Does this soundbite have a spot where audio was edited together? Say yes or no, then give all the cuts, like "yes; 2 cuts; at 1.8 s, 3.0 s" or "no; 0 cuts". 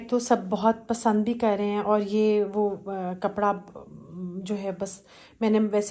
no; 0 cuts